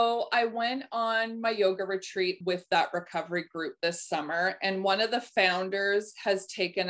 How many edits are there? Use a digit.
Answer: 1